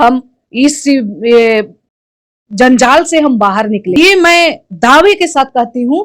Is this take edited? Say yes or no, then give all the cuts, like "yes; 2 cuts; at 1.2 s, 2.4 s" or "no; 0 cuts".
yes; 1 cut; at 3.9 s